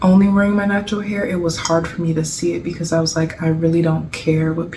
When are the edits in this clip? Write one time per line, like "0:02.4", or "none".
none